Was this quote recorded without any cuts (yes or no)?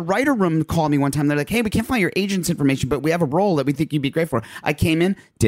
yes